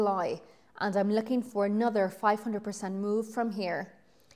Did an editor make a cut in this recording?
no; 0 cuts

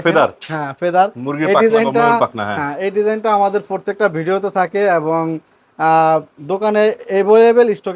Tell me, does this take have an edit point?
no; 0 cuts

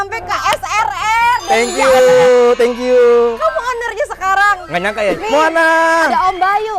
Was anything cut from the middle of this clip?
yes; 1 cut; at 5.2 s

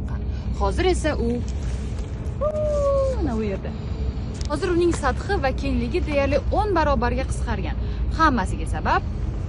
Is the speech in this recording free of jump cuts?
yes; 0 cuts

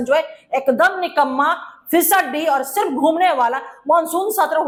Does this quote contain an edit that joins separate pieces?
no; 0 cuts

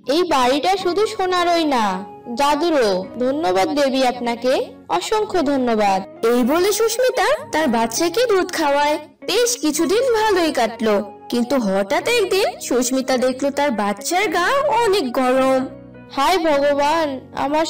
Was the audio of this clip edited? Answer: no; 0 cuts

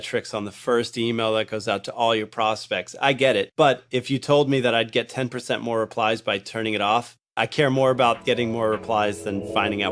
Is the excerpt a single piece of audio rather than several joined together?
yes; 0 cuts

